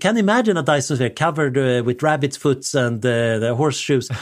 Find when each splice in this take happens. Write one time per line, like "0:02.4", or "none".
none